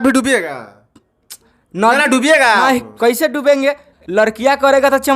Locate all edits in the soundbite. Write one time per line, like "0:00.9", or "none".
0:03.9